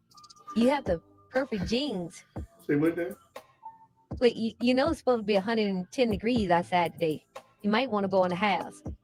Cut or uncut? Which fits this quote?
uncut